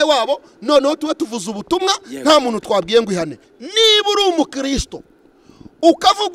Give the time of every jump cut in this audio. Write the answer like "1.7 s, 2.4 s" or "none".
3.3 s